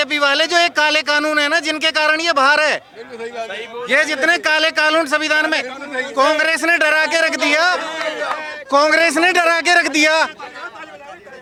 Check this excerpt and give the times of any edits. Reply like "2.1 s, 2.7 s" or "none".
none